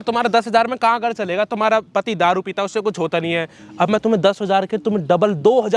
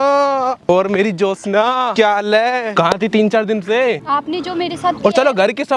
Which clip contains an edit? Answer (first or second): second